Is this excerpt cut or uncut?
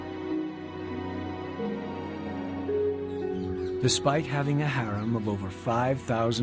uncut